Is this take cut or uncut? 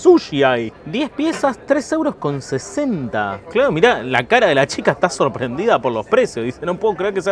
cut